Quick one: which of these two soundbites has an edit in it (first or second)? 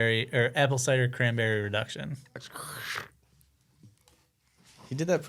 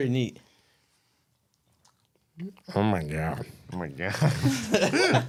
first